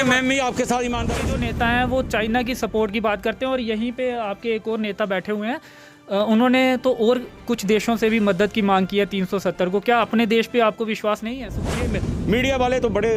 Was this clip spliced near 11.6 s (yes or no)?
yes